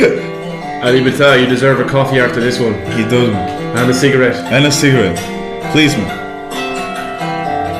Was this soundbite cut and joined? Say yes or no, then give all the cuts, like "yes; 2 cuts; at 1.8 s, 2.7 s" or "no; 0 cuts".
no; 0 cuts